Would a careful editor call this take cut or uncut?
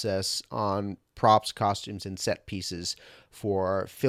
uncut